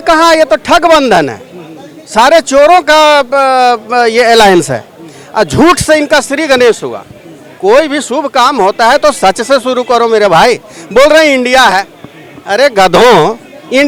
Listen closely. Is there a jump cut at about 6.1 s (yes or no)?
no